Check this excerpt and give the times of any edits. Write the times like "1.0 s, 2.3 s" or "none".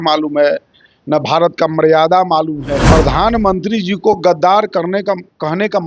2.8 s